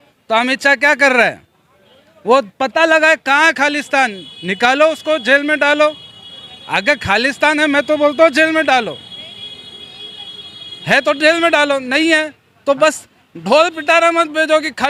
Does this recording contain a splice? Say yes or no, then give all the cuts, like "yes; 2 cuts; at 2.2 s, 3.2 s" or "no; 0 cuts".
no; 0 cuts